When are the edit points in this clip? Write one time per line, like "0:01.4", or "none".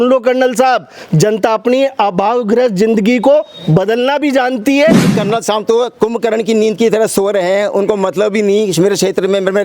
0:05.1